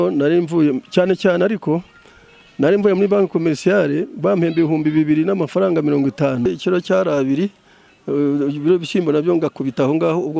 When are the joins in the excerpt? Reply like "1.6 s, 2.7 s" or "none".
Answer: 6.5 s